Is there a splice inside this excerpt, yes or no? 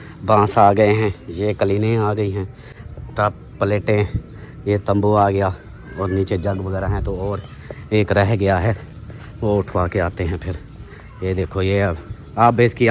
no